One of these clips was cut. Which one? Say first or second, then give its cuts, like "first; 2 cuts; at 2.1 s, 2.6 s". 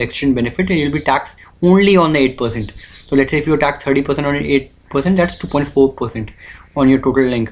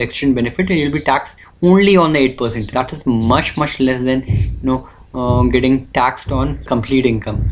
second; 2 cuts; at 2.6 s, 6.6 s